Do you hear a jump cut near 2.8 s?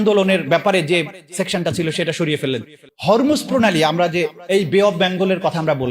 yes; 1 cut; at 2.8 s

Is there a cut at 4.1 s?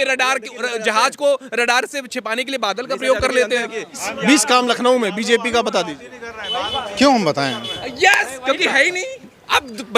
yes; 1 cut; at 4.1 s

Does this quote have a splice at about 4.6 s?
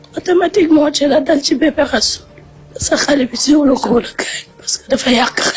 no; 1 cut; at 2.5 s

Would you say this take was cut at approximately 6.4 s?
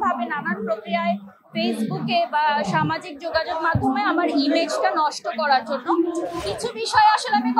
yes; 1 cut; at 6.4 s

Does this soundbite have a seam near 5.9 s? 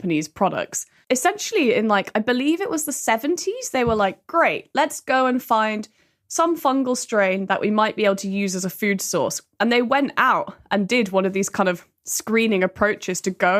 no; 1 cut; at 0.9 s

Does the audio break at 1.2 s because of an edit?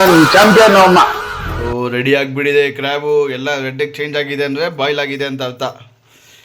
yes; 1 cut; at 1.2 s

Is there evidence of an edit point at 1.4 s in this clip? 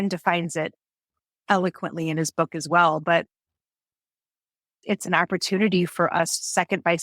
yes; 1 cut; at 1.4 s

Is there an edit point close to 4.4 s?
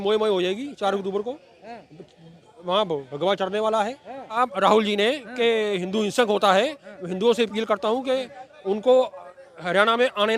yes; 1 cut; at 4.4 s

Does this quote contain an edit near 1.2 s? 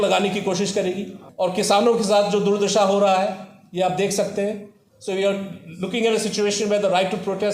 yes; 1 cut; at 1.2 s

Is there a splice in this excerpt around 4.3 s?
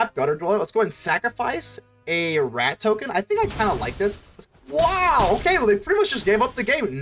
yes; 1 cut; at 4.3 s

